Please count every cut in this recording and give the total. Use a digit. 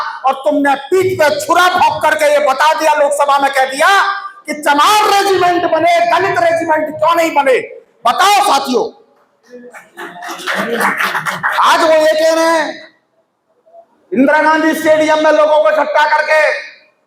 0